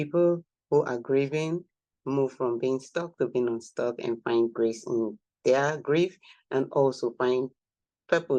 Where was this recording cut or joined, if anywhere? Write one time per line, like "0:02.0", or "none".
none